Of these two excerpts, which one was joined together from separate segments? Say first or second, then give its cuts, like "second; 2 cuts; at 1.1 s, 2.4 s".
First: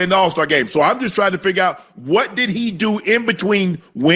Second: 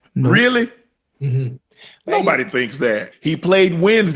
second; 1 cut; at 3.1 s